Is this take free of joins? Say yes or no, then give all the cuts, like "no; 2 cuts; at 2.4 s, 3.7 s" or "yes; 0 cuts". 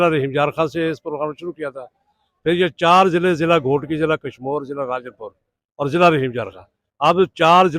yes; 0 cuts